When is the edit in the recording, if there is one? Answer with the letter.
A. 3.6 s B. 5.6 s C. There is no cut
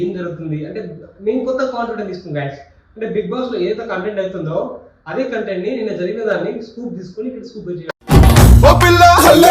C